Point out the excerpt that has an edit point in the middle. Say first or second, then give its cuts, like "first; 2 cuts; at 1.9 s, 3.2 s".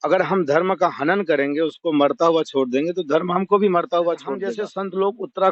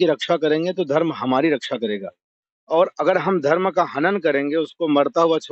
first; 1 cut; at 4.5 s